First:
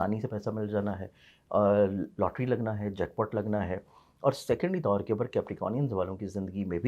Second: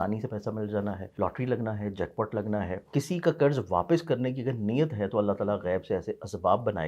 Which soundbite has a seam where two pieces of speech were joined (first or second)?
second